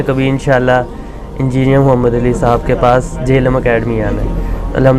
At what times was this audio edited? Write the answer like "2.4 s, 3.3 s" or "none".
none